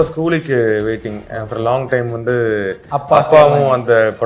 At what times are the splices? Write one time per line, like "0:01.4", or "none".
none